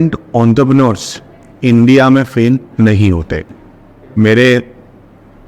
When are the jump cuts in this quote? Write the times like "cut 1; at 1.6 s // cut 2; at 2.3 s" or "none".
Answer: none